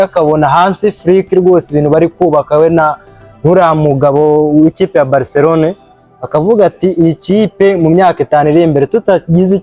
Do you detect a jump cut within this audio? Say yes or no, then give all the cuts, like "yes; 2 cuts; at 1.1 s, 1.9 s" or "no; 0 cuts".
no; 0 cuts